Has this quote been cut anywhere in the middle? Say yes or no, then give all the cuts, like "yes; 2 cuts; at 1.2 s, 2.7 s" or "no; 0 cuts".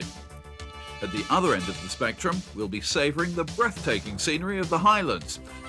no; 0 cuts